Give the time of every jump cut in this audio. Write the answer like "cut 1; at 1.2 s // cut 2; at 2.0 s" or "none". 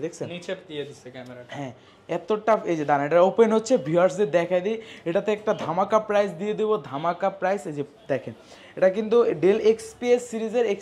none